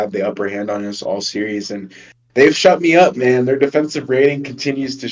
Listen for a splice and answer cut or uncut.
uncut